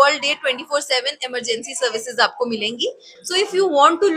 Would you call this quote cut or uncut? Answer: cut